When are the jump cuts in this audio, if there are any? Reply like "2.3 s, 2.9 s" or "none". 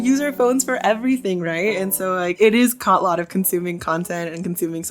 2.3 s

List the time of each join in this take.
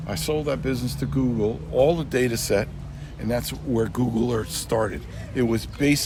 none

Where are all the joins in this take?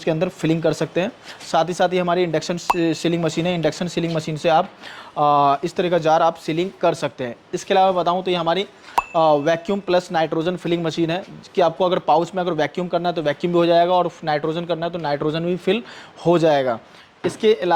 none

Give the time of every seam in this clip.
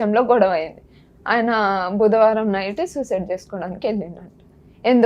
none

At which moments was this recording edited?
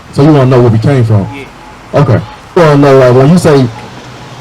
2.6 s

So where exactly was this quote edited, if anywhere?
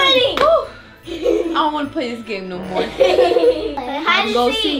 3.8 s

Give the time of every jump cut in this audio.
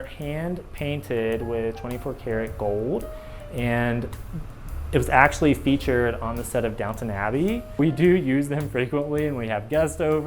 7.8 s

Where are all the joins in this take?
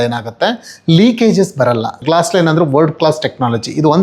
2.0 s

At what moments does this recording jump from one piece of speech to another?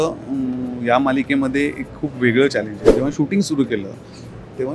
3.0 s

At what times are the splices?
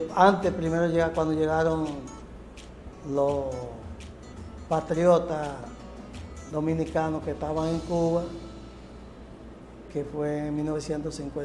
5.4 s

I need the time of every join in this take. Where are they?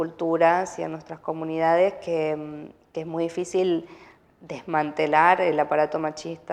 none

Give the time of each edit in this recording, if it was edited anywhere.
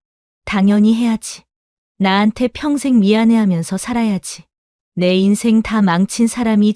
none

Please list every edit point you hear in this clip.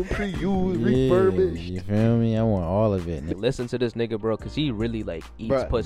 3.3 s

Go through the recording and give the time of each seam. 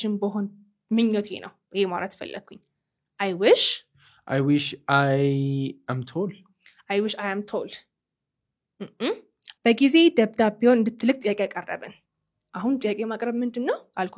9.4 s

